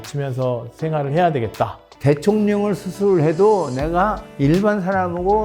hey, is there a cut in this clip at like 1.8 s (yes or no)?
yes